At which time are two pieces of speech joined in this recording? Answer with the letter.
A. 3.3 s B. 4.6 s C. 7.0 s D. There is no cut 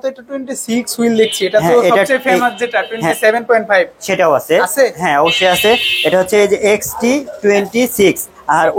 D